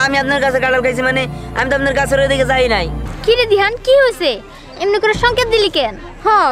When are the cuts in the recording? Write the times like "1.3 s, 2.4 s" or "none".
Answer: 3.0 s